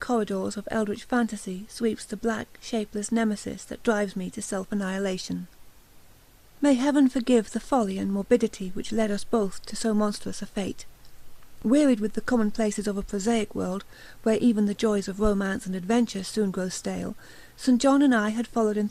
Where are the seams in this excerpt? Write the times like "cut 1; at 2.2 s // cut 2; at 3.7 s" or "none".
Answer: none